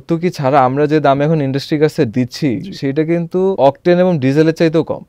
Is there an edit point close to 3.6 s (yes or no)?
yes